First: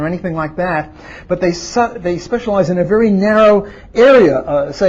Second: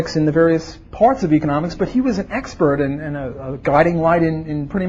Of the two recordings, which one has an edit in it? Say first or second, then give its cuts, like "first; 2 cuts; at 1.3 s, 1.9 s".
second; 1 cut; at 3.2 s